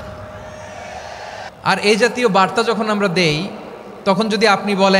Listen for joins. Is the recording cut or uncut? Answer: cut